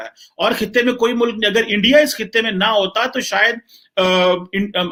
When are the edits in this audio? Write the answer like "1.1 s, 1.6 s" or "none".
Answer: none